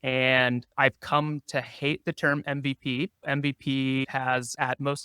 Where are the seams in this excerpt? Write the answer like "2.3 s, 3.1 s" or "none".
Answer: 3.2 s, 4.3 s